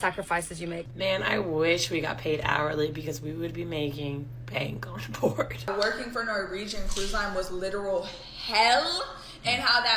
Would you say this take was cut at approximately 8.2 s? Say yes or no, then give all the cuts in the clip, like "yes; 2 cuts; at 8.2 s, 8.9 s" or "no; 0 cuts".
no; 2 cuts; at 0.8 s, 5.7 s